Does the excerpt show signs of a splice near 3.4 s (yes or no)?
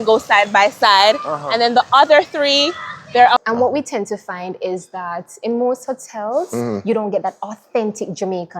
yes